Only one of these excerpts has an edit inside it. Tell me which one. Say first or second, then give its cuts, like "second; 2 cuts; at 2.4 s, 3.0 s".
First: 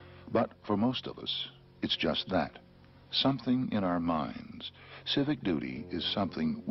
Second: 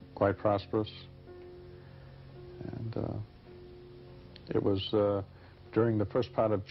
second; 1 cut; at 2.4 s